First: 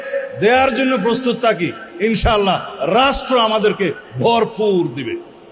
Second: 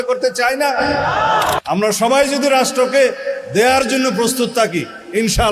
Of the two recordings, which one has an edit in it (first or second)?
second